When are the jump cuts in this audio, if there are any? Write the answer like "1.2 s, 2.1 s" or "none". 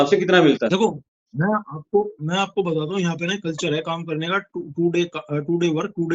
none